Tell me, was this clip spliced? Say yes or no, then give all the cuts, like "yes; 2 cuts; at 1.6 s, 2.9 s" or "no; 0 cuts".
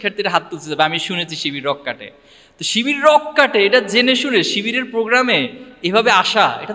no; 0 cuts